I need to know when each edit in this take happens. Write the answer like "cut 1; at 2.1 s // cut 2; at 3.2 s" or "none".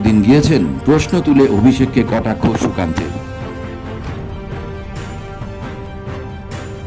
none